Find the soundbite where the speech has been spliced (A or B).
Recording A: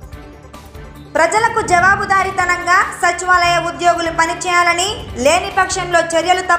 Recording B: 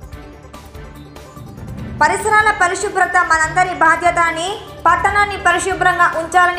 A